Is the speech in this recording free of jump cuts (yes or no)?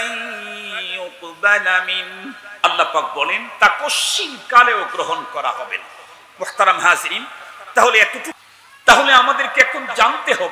no